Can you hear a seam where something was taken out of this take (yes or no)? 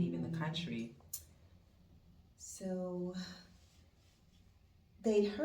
yes